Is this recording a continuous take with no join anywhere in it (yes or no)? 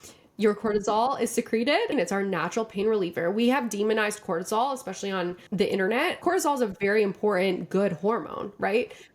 no